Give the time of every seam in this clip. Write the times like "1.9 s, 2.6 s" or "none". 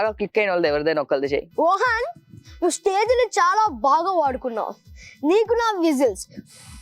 1.5 s